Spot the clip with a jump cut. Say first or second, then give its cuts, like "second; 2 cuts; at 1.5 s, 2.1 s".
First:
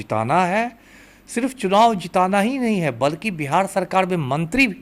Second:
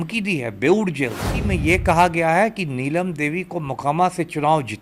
second; 1 cut; at 1.4 s